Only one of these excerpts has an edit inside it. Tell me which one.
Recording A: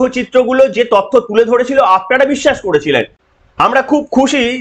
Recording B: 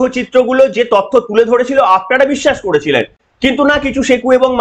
A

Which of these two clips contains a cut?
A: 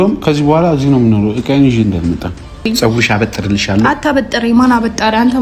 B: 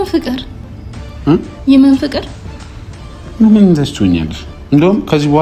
A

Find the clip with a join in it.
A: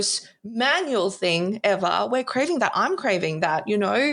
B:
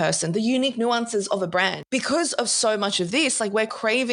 B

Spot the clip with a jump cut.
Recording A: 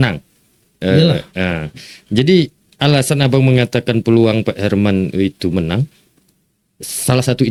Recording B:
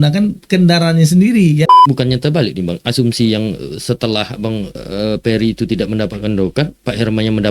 B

